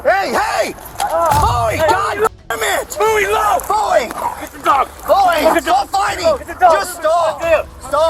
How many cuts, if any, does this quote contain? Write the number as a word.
zero